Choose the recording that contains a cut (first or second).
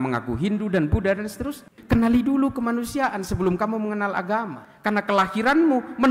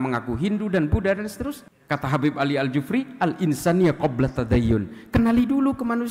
first